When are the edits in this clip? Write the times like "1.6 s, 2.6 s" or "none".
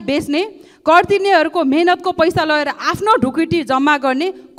none